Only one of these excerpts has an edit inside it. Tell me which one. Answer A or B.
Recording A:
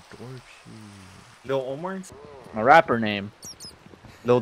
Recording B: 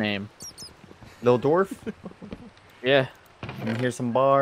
A